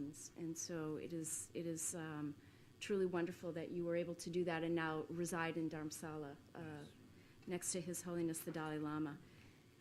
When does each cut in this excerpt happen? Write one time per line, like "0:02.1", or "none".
0:03.2